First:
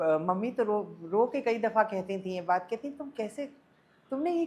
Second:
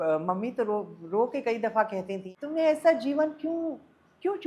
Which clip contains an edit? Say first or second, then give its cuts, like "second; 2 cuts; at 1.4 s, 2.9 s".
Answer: second; 1 cut; at 2.2 s